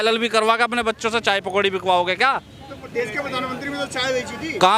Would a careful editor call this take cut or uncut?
uncut